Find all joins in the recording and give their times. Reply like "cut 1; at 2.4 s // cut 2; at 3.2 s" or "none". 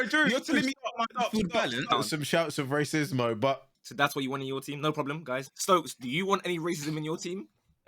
cut 1; at 1.9 s // cut 2; at 3.8 s // cut 3; at 5.5 s